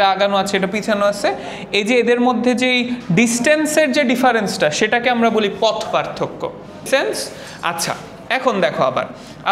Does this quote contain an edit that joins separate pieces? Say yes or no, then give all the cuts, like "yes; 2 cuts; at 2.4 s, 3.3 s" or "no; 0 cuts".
no; 0 cuts